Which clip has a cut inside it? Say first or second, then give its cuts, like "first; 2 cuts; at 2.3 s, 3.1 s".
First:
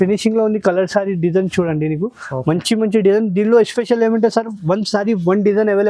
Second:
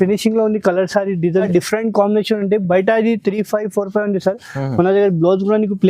second; 1 cut; at 1.5 s